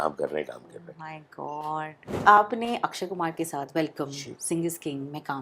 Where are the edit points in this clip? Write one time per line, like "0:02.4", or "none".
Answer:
0:02.2

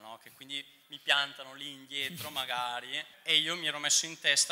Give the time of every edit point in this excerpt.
0:03.1

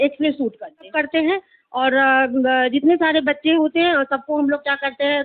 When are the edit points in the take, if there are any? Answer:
0:00.9

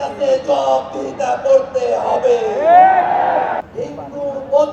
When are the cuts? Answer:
0:03.7

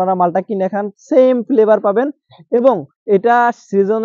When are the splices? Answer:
none

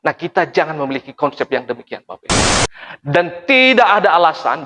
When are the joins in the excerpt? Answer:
0:02.5

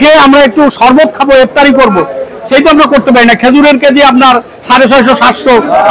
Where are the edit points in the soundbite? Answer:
none

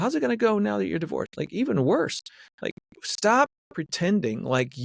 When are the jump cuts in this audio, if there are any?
none

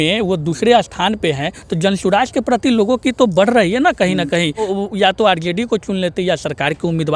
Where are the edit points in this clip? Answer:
0:04.7

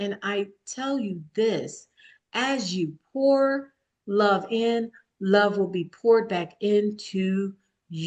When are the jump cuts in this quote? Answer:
none

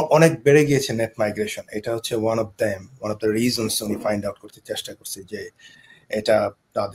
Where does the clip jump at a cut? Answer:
none

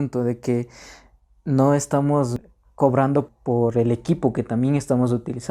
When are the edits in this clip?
0:02.4
0:03.3

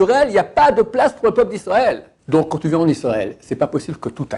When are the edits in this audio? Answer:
0:02.1

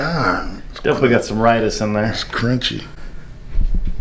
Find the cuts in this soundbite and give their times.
none

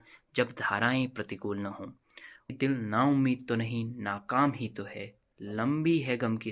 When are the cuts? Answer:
0:02.5

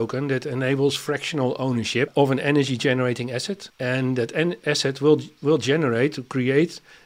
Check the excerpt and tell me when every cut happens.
0:02.1
0:03.6

